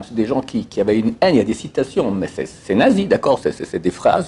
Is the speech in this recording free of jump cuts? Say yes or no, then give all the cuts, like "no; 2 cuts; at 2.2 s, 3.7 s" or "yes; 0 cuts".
yes; 0 cuts